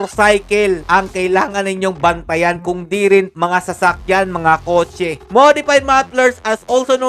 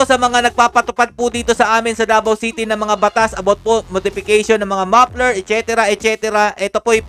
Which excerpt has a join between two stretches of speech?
first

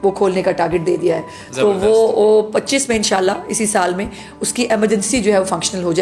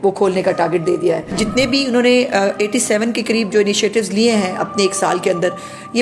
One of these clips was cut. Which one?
second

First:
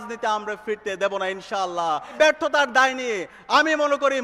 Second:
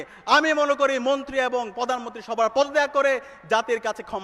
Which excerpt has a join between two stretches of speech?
first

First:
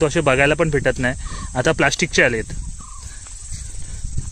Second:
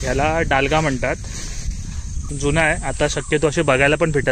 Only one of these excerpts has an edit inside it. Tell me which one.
second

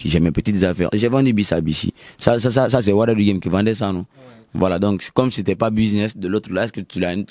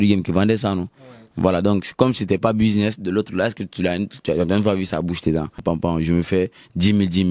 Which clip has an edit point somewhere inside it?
second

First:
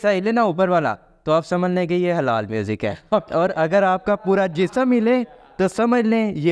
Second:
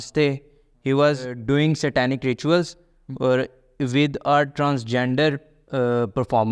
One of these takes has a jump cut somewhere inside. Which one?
second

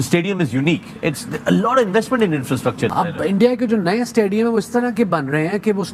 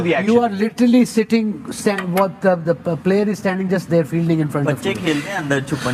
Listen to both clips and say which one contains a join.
first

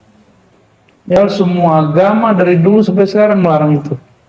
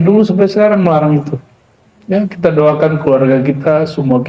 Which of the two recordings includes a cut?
first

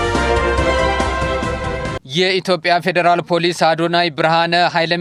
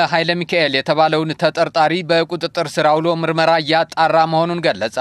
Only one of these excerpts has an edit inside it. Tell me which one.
first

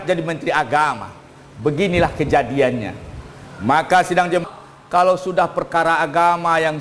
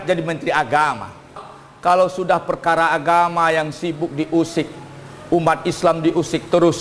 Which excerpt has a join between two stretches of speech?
second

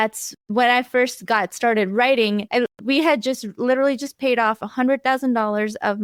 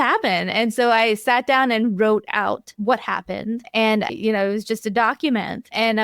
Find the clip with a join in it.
second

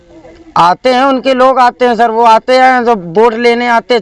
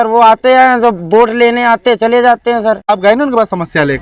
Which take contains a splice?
second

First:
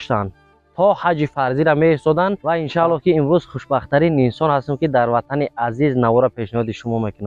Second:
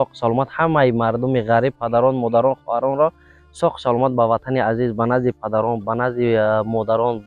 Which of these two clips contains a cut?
first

